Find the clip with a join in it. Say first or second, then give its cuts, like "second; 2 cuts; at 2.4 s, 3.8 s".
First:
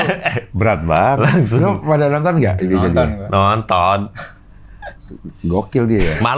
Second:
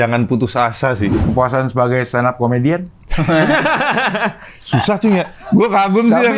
second; 2 cuts; at 1.2 s, 5.4 s